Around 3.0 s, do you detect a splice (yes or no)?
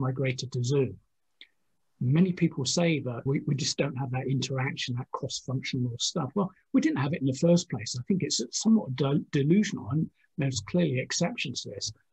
no